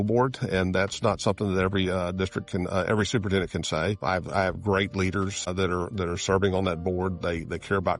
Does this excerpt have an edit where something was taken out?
yes; 2 cuts; at 4.0 s, 5.5 s

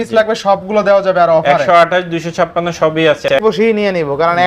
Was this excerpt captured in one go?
no; 1 cut; at 3.3 s

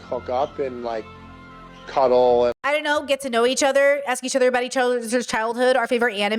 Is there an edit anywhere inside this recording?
no; 0 cuts

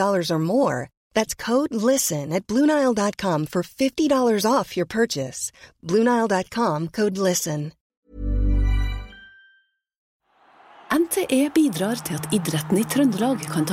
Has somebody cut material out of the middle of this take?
yes; 2 cuts; at 7.8 s, 10.4 s

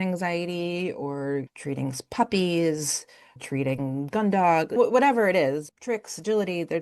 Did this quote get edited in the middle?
yes; 4 cuts; at 1.5 s, 3.4 s, 4.8 s, 5.7 s

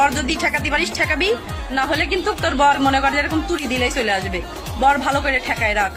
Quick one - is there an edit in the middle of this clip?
no; 0 cuts

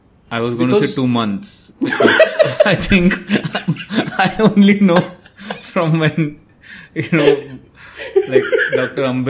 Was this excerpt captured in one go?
yes; 0 cuts

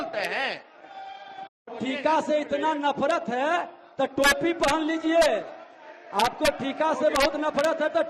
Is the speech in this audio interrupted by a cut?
yes; 1 cut; at 1.8 s

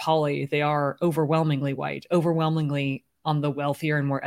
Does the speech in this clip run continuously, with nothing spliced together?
yes; 0 cuts

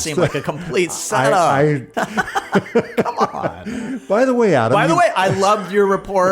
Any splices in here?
yes; 1 cut; at 1.9 s

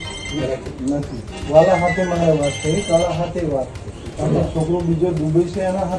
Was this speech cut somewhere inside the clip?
yes; 2 cuts; at 1.4 s, 4.1 s

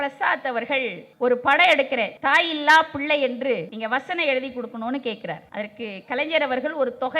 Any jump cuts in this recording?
yes; 4 cuts; at 1.0 s, 2.1 s, 3.7 s, 5.4 s

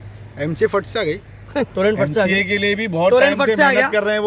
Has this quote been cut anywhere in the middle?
yes; 1 cut; at 1.7 s

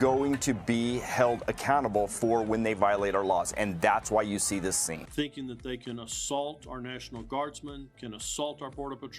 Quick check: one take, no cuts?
no; 1 cut; at 5.0 s

